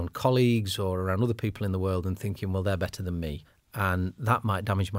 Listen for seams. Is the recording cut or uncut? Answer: cut